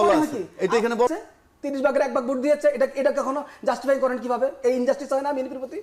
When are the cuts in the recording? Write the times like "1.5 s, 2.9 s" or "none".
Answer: 1.1 s